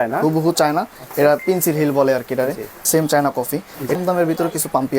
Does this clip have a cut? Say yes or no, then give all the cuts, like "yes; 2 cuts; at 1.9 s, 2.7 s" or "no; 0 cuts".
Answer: yes; 2 cuts; at 2.7 s, 4.0 s